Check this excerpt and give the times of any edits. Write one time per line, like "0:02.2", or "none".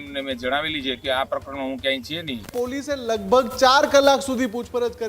0:02.5